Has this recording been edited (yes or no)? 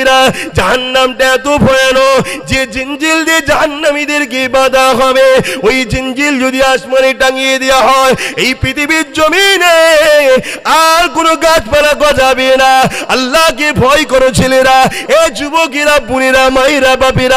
no